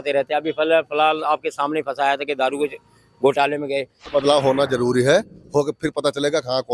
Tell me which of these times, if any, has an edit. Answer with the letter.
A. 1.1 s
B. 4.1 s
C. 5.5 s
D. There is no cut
B